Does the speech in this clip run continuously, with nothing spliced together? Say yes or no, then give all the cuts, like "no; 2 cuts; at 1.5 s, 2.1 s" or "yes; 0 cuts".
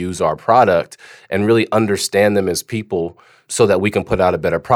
no; 1 cut; at 3.4 s